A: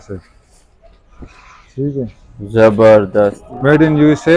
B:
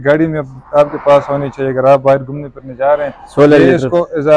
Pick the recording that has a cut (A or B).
A